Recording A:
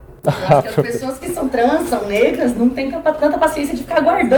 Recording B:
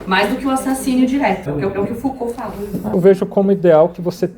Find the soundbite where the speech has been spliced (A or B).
B